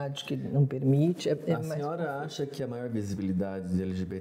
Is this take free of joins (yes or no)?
yes